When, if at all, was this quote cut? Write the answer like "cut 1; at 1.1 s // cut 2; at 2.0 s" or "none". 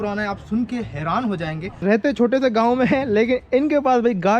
cut 1; at 1.7 s